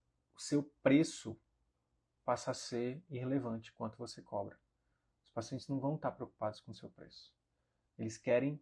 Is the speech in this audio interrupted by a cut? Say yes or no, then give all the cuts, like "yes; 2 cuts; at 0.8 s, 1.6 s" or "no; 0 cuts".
no; 0 cuts